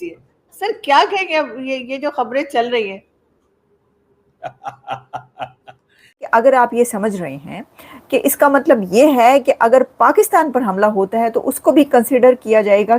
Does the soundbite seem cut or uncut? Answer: cut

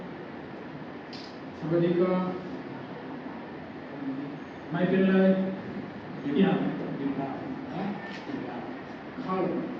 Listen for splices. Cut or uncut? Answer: uncut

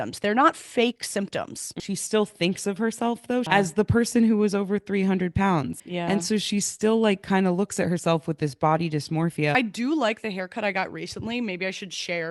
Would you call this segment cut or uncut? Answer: cut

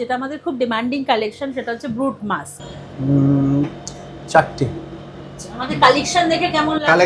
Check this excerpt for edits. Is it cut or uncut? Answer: cut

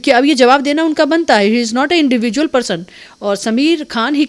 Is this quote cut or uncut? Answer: uncut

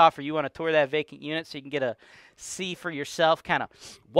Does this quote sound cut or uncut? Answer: uncut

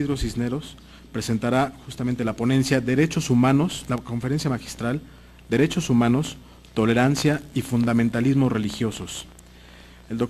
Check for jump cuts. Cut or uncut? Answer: uncut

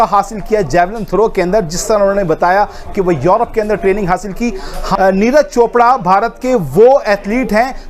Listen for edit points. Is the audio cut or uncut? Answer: cut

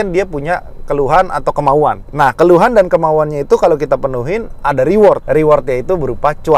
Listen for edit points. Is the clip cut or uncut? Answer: cut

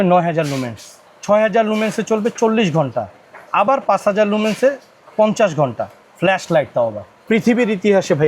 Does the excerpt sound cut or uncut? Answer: cut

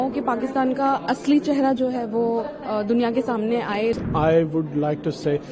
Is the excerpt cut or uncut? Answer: cut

